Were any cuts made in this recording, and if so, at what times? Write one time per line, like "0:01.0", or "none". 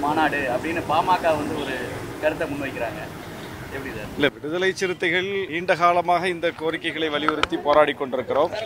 0:05.5